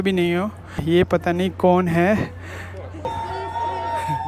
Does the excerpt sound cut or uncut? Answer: cut